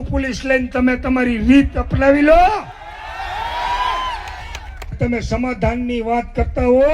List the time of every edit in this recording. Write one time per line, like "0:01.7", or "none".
0:04.9